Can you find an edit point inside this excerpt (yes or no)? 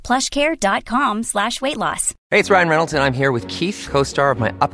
yes